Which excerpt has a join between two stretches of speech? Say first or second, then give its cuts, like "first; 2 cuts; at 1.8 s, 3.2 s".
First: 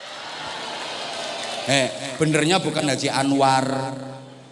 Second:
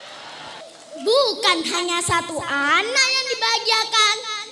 second; 1 cut; at 1.0 s